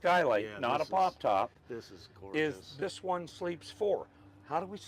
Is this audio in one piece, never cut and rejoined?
yes; 0 cuts

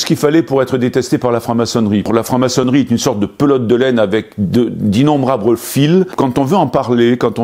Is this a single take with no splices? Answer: no; 2 cuts; at 2.1 s, 6.1 s

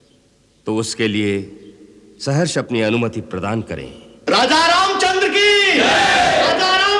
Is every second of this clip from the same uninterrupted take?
no; 1 cut; at 4.1 s

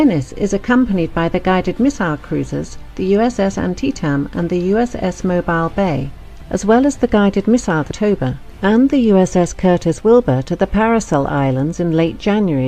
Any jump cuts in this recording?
no; 0 cuts

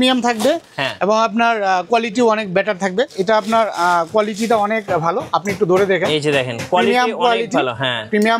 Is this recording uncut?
no; 1 cut; at 3.1 s

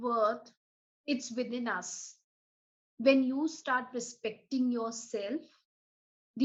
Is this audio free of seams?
yes; 0 cuts

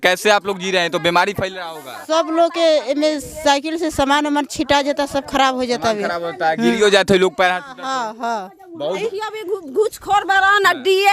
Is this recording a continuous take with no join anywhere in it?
no; 1 cut; at 9.0 s

